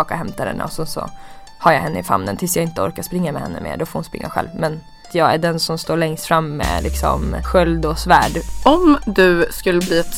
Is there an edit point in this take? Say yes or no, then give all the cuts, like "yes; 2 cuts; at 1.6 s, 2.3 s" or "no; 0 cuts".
yes; 3 cuts; at 5.1 s, 7.4 s, 8.4 s